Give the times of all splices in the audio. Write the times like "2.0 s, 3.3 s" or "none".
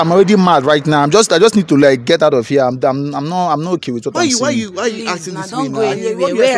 none